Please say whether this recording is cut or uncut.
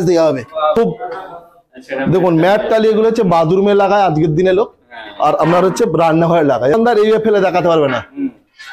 cut